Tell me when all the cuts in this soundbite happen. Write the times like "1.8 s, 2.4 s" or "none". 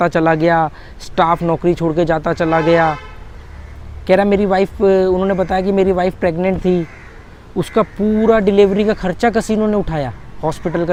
none